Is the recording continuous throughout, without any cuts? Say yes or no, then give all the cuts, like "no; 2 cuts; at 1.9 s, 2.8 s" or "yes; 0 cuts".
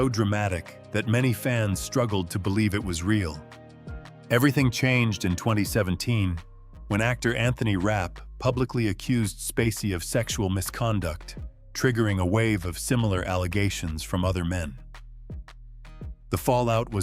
no; 2 cuts; at 14.8 s, 16.3 s